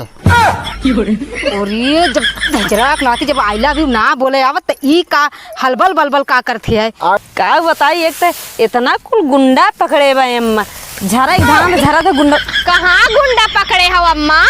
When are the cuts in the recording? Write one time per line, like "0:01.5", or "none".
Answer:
0:07.2